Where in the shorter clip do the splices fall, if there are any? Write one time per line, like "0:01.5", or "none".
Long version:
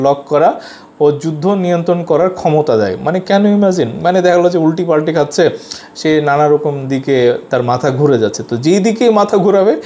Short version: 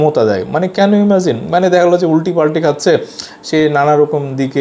none